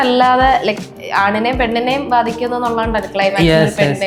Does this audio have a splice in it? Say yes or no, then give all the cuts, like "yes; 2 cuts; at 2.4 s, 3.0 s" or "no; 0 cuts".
no; 0 cuts